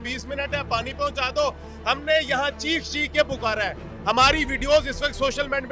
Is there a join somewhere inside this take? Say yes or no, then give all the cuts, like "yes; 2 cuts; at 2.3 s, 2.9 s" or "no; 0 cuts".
no; 0 cuts